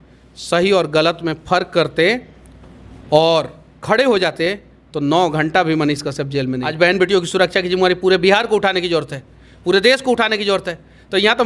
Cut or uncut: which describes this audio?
cut